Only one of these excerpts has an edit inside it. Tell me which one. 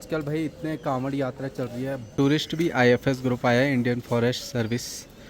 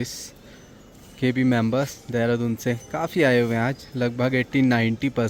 first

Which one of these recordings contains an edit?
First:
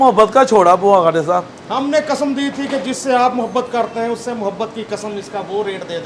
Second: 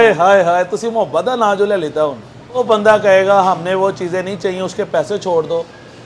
second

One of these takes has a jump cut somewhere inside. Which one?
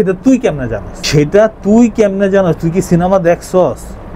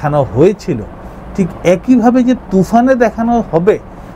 first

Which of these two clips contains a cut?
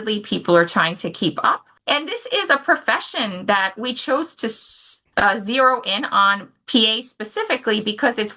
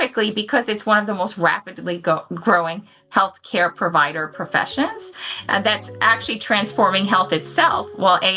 first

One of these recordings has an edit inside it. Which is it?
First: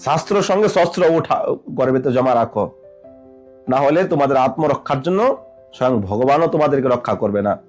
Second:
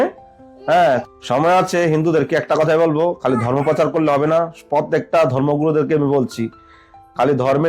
second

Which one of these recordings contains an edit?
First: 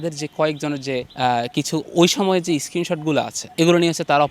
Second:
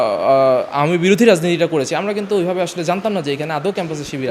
first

